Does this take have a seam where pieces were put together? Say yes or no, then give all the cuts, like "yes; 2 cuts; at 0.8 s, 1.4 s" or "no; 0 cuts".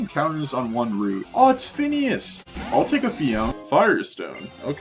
yes; 3 cuts; at 1.3 s, 2.4 s, 3.6 s